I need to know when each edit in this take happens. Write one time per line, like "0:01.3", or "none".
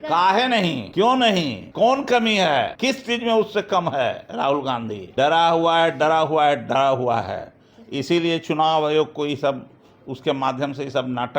0:00.8
0:01.6
0:02.7
0:05.0